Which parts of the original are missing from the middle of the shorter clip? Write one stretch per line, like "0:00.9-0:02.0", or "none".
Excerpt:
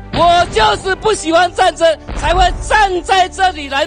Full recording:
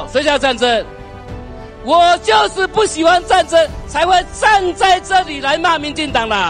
none